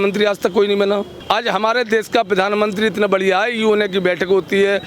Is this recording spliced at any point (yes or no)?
yes